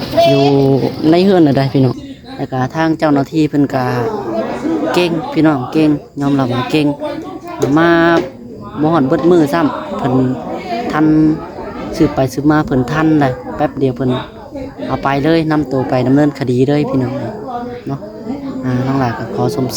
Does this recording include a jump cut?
yes; 1 cut; at 2.1 s

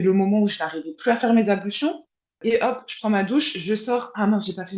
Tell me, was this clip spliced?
yes; 1 cut; at 2.4 s

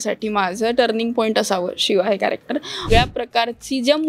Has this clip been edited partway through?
yes; 1 cut; at 2.9 s

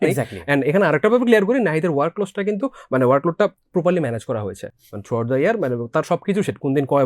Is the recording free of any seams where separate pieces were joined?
yes; 0 cuts

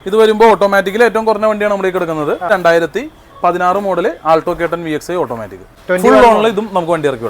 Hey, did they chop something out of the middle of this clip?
yes; 2 cuts; at 2.5 s, 5.8 s

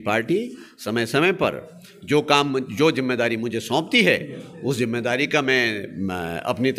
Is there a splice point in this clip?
no; 0 cuts

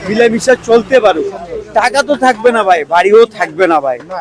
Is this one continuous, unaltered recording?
yes; 0 cuts

